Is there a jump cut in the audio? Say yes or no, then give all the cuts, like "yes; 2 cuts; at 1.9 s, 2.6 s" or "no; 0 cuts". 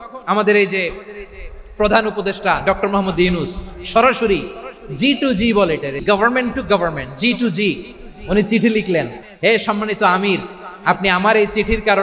yes; 2 cuts; at 6.0 s, 9.2 s